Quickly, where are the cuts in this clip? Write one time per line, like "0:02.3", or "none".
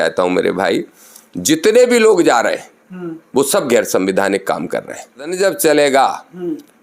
0:05.3